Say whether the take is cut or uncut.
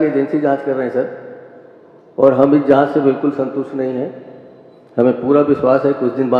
uncut